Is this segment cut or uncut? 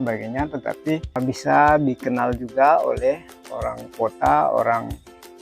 cut